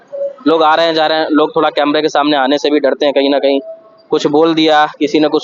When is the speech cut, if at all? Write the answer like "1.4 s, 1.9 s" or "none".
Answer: none